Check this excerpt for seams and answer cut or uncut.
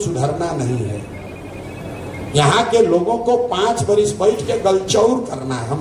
uncut